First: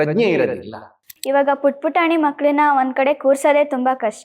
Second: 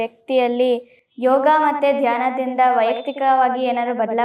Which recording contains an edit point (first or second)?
first